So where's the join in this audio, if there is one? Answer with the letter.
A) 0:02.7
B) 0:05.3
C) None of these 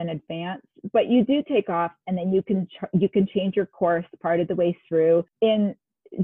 B